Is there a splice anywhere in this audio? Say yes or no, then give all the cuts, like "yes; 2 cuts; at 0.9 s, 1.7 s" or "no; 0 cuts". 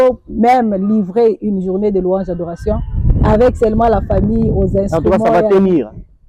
no; 0 cuts